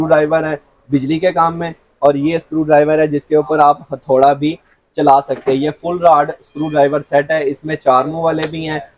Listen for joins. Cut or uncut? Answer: uncut